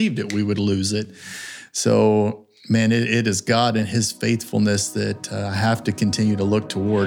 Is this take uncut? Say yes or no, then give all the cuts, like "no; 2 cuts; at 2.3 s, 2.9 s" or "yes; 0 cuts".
yes; 0 cuts